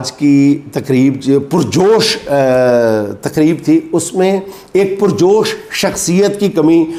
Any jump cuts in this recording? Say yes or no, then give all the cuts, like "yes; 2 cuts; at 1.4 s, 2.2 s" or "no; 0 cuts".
no; 0 cuts